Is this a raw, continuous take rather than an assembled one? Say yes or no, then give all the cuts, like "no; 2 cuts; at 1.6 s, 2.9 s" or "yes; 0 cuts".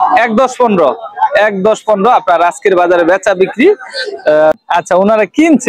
no; 1 cut; at 4.6 s